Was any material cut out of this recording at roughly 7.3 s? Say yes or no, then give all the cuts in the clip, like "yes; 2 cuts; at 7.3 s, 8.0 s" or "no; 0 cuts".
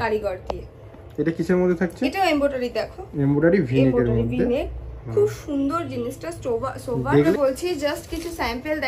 yes; 1 cut; at 7.3 s